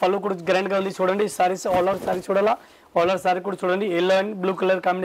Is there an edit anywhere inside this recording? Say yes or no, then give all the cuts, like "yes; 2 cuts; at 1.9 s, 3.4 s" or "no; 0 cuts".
no; 0 cuts